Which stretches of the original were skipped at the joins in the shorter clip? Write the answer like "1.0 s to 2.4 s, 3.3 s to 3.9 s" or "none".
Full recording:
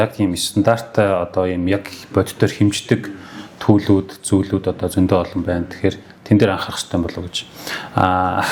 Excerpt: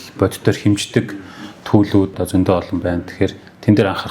4.2 s to 4.8 s